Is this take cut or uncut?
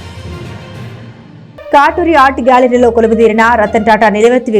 uncut